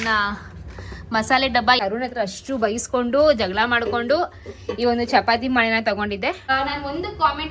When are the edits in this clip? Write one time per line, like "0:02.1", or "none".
0:01.8
0:06.5